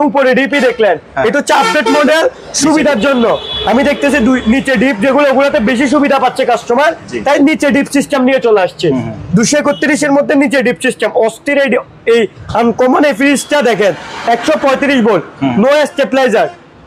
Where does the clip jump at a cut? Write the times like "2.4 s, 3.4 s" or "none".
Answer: none